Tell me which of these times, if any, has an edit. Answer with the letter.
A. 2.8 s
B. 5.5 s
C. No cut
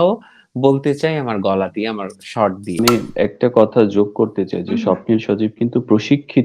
A